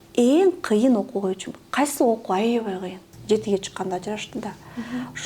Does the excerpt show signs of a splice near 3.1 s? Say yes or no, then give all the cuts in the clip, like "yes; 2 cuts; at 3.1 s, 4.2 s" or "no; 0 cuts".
yes; 1 cut; at 3.1 s